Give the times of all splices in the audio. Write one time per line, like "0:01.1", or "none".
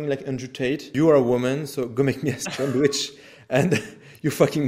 0:00.9